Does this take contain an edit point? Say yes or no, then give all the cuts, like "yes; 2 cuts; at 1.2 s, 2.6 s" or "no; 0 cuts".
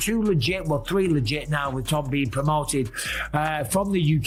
no; 0 cuts